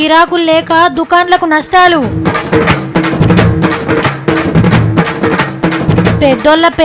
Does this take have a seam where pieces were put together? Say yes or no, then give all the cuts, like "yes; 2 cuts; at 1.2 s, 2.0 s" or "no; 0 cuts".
no; 0 cuts